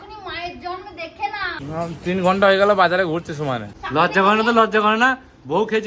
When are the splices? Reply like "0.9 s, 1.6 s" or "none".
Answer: 1.6 s, 3.7 s